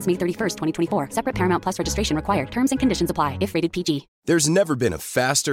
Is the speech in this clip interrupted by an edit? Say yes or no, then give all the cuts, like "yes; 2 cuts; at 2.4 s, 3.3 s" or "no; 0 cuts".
yes; 1 cut; at 4.1 s